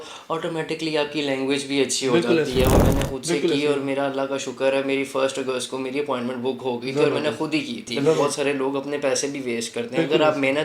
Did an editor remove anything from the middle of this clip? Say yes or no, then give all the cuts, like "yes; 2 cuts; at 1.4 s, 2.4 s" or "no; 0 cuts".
yes; 2 cuts; at 2.8 s, 8.2 s